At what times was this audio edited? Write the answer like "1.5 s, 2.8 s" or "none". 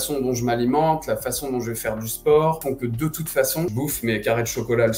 2.6 s, 3.7 s